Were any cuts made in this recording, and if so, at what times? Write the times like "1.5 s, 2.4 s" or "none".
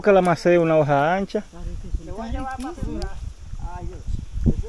none